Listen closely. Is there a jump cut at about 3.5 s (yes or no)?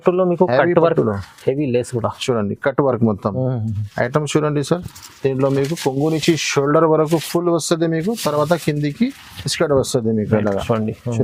no